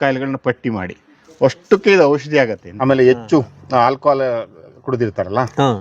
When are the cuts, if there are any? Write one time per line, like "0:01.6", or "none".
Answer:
0:02.6